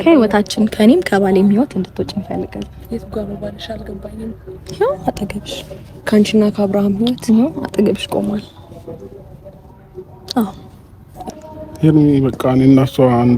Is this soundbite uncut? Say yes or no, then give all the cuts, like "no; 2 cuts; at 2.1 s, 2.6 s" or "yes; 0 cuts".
no; 1 cut; at 11.3 s